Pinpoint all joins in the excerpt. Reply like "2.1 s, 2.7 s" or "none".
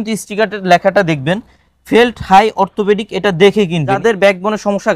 4.0 s

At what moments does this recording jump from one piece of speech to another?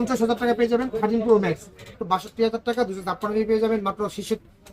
1.9 s

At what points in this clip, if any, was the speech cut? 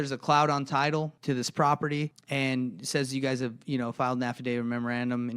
1.1 s, 2.2 s

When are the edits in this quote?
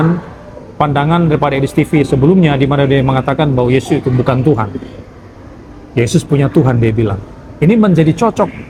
none

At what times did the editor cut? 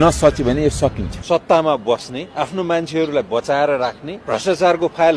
1.1 s, 2.2 s, 4.1 s

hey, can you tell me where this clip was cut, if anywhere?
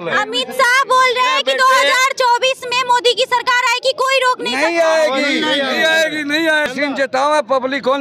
6.7 s

